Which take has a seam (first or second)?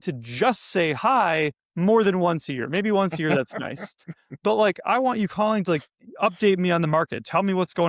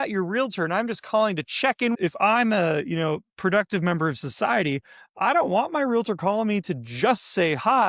second